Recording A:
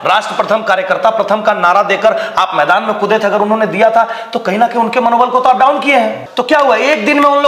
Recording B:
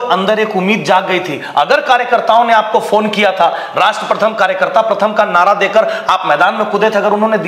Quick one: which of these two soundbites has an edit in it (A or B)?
A